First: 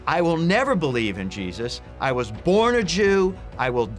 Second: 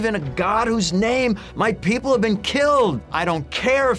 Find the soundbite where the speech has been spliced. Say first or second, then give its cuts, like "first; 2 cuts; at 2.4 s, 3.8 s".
second; 1 cut; at 3.1 s